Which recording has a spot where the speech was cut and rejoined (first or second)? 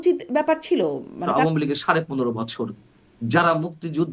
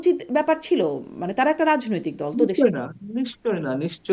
first